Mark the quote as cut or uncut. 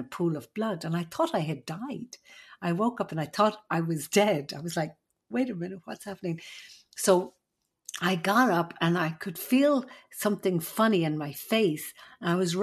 uncut